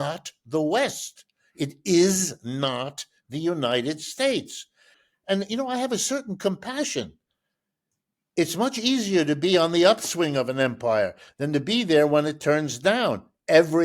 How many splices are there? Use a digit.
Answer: 1